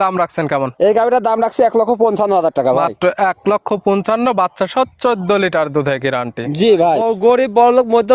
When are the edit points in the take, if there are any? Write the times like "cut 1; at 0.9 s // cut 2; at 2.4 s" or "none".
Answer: cut 1; at 7.0 s